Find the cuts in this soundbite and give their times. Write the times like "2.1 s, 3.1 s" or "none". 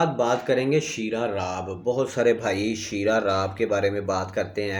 none